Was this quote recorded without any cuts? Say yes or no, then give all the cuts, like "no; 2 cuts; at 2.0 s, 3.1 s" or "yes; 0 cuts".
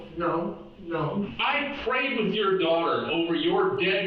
no; 1 cut; at 1.3 s